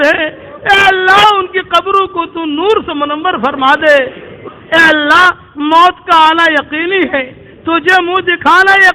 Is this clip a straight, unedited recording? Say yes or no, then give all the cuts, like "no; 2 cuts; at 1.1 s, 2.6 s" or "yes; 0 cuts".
no; 1 cut; at 4.4 s